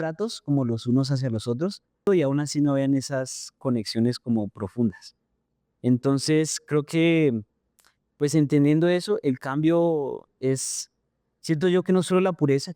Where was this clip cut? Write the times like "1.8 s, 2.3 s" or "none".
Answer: 2.1 s, 10.3 s